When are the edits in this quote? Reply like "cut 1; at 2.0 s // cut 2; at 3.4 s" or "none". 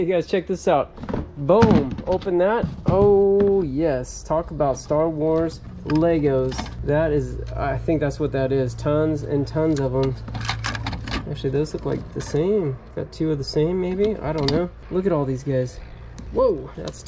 none